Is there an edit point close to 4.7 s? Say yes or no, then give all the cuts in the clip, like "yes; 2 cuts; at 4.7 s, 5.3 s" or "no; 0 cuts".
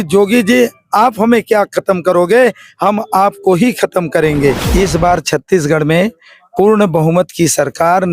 yes; 1 cut; at 4.7 s